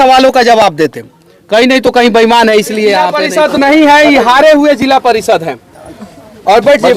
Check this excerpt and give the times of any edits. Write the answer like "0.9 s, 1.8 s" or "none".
3.2 s